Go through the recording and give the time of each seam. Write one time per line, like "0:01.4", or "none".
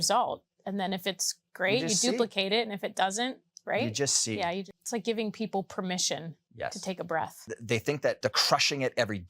0:04.7
0:06.4
0:07.4
0:08.2